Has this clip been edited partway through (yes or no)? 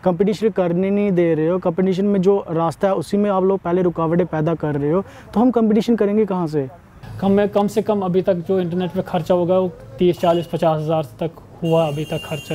yes